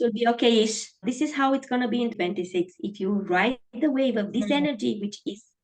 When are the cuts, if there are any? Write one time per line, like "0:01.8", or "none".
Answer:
0:01.0
0:02.1

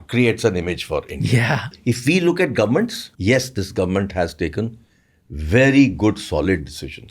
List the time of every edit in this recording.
0:01.7
0:03.1

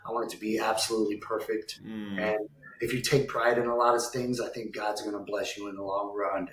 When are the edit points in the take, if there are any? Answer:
none

